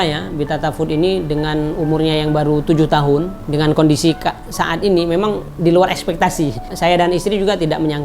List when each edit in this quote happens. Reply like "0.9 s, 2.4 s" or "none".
6.7 s